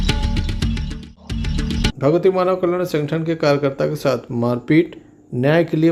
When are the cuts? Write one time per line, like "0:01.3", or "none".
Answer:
none